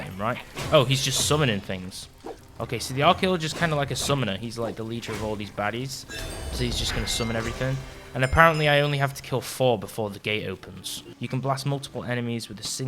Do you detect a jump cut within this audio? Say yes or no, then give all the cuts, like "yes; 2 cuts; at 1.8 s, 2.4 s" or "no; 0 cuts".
yes; 1 cut; at 11.0 s